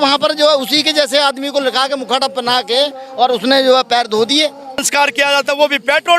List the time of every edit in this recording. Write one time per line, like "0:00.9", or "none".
0:04.8